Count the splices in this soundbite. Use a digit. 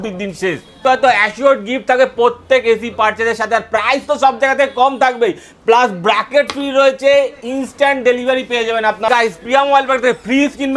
2